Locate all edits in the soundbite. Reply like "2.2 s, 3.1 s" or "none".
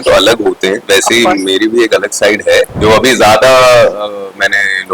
2.7 s